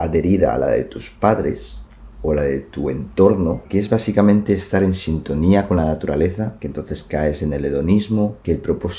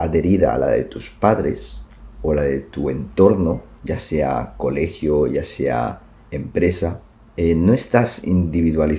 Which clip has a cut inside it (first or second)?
first